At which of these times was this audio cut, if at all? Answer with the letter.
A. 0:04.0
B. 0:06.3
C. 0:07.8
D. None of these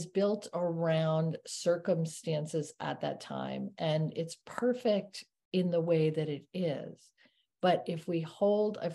D